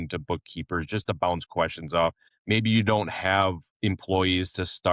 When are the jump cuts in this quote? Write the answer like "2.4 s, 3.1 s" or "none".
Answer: 2.3 s, 3.7 s